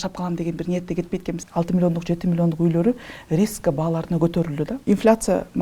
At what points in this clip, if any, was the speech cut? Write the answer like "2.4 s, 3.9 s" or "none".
1.4 s, 4.8 s